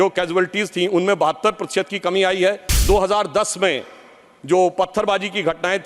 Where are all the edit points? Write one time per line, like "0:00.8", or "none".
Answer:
0:02.7